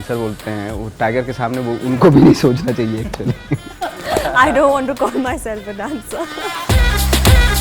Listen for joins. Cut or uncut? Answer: cut